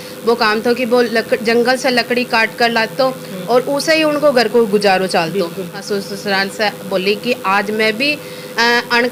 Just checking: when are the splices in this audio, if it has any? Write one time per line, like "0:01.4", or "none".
0:05.8